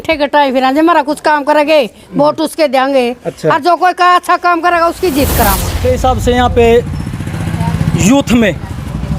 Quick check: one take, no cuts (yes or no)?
no